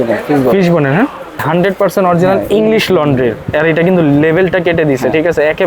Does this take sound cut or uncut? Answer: cut